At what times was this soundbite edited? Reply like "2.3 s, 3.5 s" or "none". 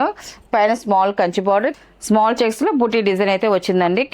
1.7 s